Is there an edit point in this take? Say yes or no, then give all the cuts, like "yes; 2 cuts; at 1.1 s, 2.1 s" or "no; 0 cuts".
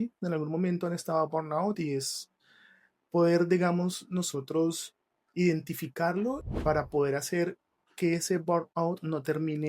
yes; 1 cut; at 6.5 s